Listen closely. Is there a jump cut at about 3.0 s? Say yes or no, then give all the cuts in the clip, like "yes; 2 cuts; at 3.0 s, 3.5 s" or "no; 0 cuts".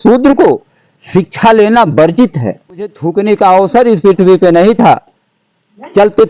yes; 1 cut; at 3.0 s